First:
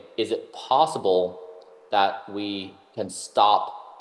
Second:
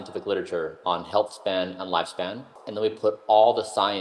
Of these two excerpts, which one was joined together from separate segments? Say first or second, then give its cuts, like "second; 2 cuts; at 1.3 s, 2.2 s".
second; 1 cut; at 2.6 s